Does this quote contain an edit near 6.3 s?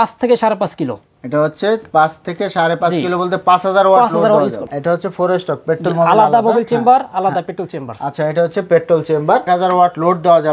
no; 2 cuts; at 4.7 s, 9.5 s

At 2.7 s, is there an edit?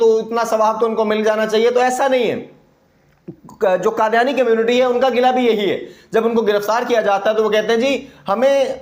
no; 0 cuts

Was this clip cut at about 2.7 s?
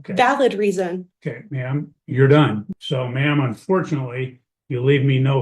yes; 1 cut; at 2.7 s

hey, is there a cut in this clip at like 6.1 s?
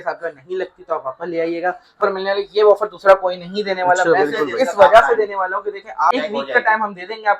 yes; 2 cuts; at 2.0 s, 6.1 s

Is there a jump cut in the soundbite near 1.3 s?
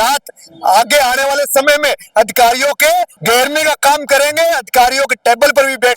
no; 1 cut; at 3.1 s

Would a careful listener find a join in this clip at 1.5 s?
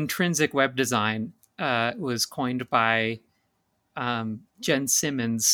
no; 0 cuts

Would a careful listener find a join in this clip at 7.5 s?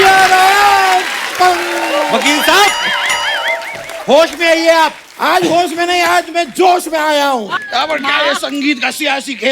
yes; 1 cut; at 7.5 s

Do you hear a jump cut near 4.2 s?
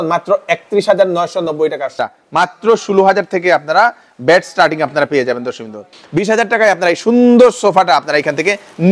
no; 2 cuts; at 2.1 s, 6.0 s

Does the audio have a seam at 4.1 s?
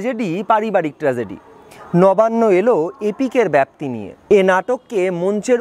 yes; 1 cut; at 4.1 s

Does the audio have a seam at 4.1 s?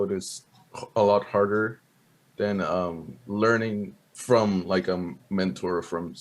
yes; 1 cut; at 4.1 s

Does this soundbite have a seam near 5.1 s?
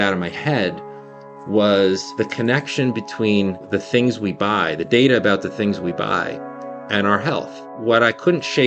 no; 3 cuts; at 2.1 s, 3.7 s, 7.6 s

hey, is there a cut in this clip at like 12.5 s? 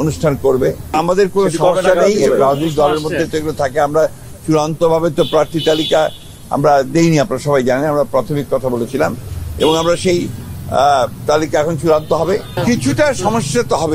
yes; 2 cuts; at 0.9 s, 12.5 s

